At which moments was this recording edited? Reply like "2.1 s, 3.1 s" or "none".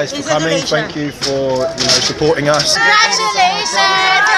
2.8 s